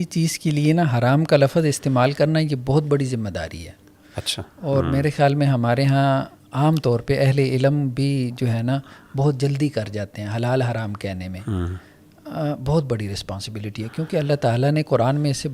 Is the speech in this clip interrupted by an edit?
no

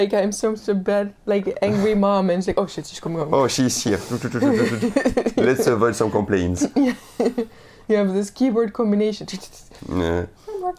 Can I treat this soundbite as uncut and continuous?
yes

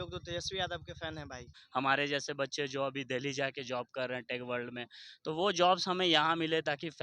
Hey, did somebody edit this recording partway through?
yes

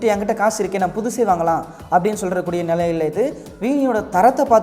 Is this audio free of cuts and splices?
yes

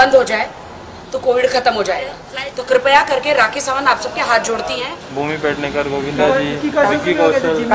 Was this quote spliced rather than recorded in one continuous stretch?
yes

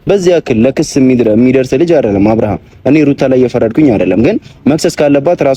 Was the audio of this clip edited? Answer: no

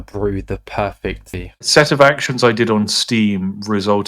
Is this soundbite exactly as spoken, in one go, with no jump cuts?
no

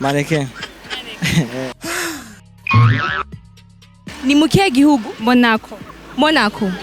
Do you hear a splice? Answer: yes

